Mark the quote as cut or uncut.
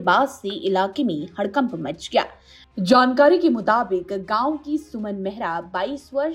uncut